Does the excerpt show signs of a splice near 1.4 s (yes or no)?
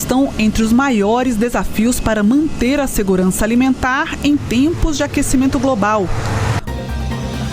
no